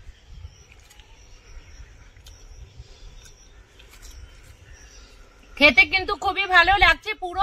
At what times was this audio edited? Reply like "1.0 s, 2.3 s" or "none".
none